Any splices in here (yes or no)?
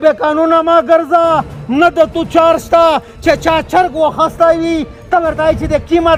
no